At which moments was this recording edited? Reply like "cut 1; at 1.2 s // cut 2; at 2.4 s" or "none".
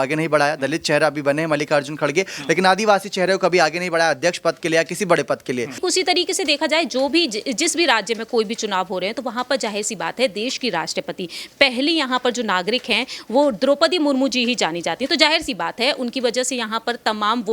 cut 1; at 5.8 s